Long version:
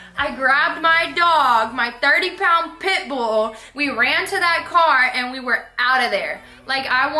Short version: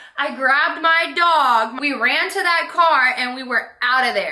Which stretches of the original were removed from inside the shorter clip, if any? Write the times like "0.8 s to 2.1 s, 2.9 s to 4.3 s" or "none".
1.8 s to 3.7 s